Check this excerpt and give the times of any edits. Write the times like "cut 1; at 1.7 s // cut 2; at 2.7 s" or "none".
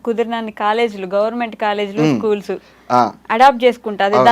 none

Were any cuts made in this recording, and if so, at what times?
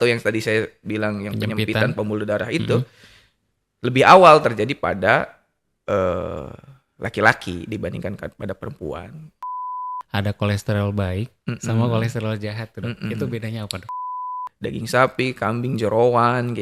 cut 1; at 9.7 s // cut 2; at 14.3 s

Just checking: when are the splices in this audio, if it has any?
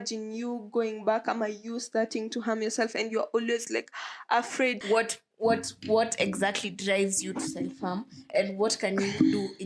cut 1; at 4.8 s

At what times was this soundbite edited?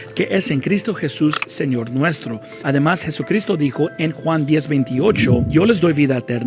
cut 1; at 2.8 s

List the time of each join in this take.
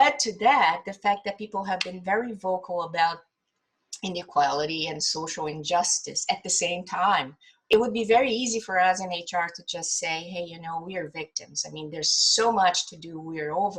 cut 1; at 7.7 s

